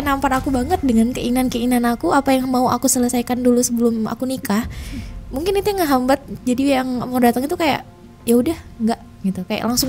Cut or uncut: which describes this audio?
uncut